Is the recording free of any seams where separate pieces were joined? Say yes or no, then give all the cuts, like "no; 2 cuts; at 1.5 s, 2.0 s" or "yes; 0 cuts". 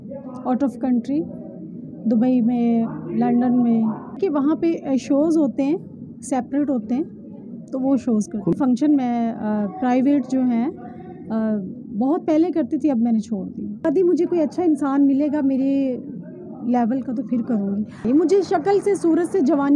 no; 4 cuts; at 4.2 s, 8.5 s, 13.8 s, 18.0 s